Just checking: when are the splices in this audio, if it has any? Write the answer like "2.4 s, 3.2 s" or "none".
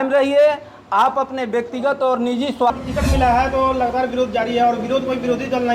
2.7 s

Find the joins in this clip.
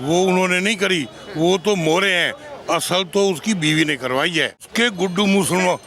4.7 s

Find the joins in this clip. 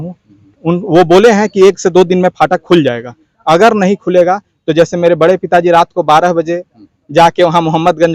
none

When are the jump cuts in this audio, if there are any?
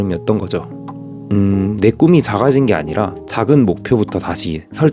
1.2 s

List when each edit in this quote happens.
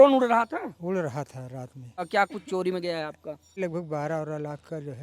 2.1 s, 3.6 s

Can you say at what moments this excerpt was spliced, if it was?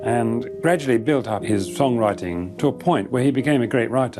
1.4 s, 2.5 s

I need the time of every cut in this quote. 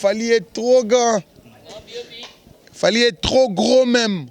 none

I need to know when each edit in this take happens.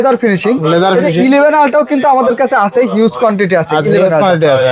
none

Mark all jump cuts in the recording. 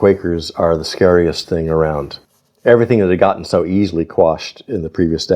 2.1 s

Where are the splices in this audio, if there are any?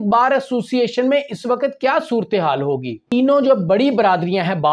3.0 s

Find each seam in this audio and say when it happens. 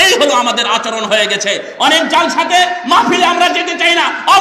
none

